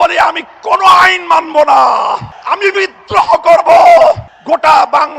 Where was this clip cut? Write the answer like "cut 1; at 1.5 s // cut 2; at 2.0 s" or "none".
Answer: cut 1; at 2.3 s // cut 2; at 4.3 s